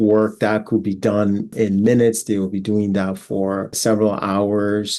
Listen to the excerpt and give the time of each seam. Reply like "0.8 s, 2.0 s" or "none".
1.5 s, 3.8 s

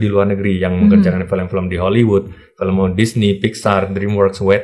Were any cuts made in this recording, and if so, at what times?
none

